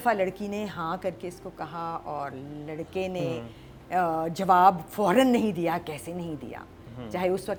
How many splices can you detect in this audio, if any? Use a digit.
0